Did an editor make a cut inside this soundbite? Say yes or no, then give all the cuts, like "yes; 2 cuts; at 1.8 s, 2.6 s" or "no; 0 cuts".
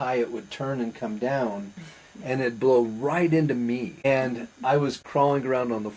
yes; 2 cuts; at 4.0 s, 5.0 s